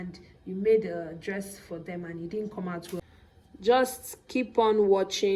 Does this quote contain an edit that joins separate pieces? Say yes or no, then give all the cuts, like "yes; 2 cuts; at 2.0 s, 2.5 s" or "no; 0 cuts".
yes; 1 cut; at 3.0 s